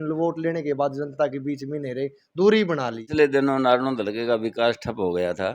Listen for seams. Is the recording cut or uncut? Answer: cut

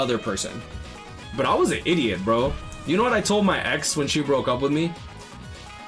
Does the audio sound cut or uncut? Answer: cut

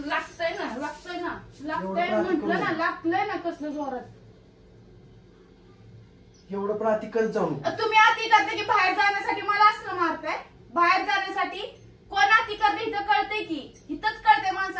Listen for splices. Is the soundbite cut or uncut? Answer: uncut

